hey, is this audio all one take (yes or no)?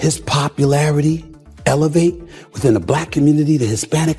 yes